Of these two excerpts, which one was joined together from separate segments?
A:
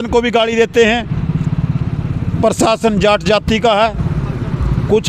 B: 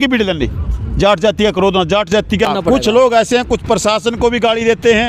B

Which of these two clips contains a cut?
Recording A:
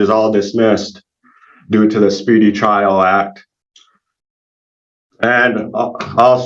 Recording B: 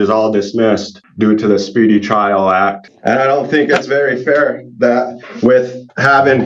B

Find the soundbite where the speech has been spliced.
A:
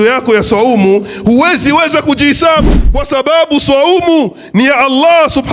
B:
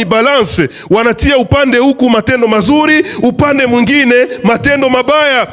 A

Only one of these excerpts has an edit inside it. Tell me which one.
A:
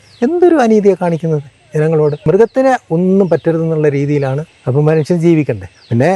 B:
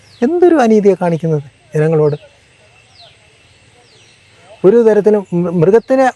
A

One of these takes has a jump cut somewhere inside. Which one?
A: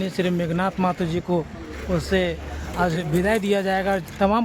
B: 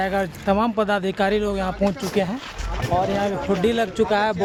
A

